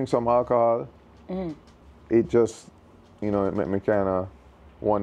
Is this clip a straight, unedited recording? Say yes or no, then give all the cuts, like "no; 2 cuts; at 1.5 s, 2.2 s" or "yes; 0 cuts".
yes; 0 cuts